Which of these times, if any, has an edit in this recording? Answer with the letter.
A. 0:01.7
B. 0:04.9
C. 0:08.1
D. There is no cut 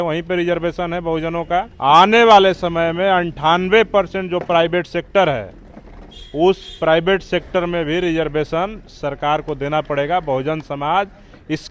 A